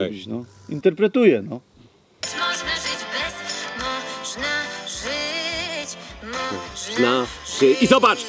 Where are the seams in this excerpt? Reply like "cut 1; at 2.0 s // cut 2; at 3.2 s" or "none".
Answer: none